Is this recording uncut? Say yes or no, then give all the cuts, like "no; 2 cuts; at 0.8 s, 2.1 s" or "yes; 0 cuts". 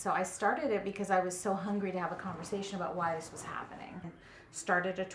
no; 1 cut; at 4.2 s